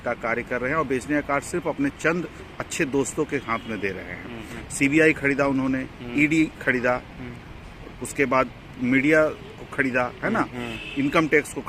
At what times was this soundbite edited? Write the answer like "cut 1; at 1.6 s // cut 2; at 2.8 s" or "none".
cut 1; at 4.5 s